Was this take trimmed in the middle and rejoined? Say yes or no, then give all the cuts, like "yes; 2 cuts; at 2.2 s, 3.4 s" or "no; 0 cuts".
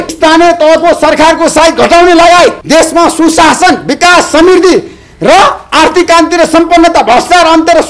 no; 0 cuts